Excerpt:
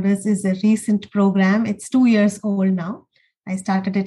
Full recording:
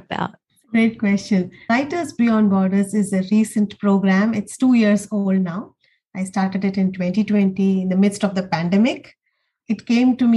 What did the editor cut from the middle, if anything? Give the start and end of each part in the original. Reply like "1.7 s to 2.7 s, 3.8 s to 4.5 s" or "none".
none